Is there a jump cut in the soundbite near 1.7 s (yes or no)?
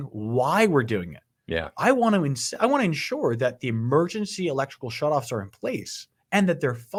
no